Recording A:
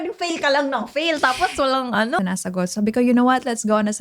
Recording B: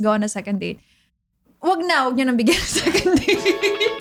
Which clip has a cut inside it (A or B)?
A